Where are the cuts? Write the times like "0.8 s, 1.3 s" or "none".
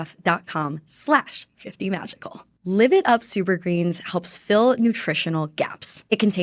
2.4 s